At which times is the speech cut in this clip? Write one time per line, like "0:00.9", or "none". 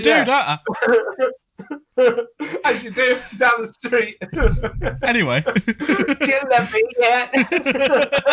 none